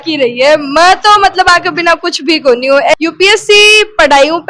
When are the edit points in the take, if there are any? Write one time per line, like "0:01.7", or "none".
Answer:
0:02.9